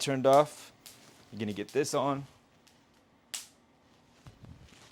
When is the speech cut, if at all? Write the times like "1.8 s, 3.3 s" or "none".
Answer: none